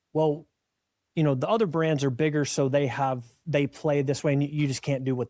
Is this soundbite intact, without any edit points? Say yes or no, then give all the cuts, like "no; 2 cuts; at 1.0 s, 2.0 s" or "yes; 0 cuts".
yes; 0 cuts